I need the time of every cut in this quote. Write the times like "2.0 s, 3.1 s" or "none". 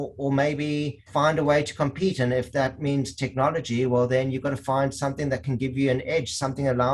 1.0 s

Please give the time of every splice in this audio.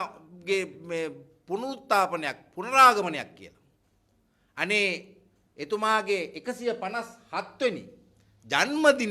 none

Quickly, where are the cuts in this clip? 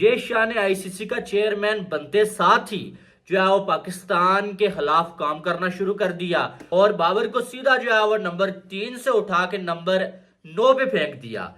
6.6 s

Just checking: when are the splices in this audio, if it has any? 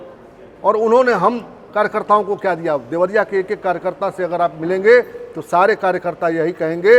none

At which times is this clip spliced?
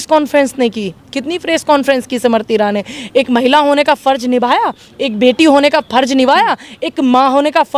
none

